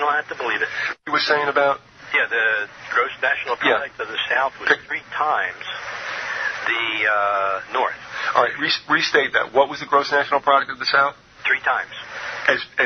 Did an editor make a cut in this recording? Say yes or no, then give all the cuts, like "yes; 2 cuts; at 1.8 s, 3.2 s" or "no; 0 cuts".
yes; 1 cut; at 7.8 s